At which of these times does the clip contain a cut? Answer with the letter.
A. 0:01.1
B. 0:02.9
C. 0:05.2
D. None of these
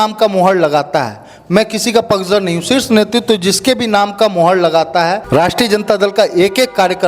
C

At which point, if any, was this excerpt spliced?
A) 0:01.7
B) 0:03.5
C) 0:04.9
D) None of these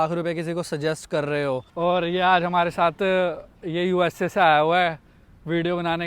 A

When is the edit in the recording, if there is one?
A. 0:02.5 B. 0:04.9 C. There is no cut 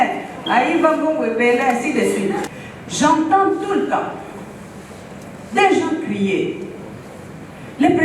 A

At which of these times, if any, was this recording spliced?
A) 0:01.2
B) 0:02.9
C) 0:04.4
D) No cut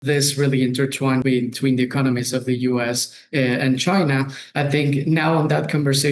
A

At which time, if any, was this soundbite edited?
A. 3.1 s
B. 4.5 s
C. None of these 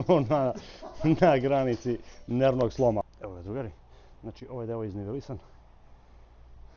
A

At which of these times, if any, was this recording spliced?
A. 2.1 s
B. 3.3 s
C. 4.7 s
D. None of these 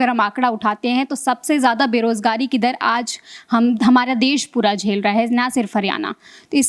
D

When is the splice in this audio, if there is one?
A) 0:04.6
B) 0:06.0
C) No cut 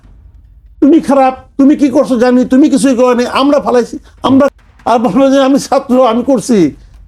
A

